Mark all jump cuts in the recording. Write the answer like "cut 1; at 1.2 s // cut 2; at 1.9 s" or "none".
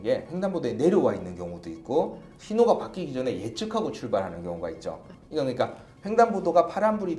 cut 1; at 5.1 s